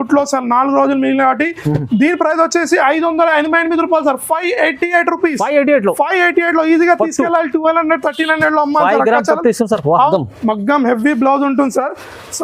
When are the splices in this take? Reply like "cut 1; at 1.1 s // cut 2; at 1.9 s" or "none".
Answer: cut 1; at 10.1 s